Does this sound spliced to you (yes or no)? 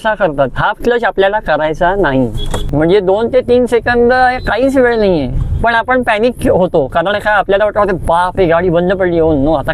yes